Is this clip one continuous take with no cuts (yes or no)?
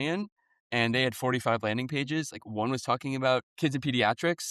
no